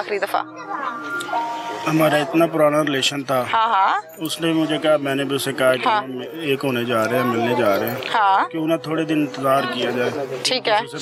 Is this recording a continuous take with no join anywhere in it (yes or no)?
yes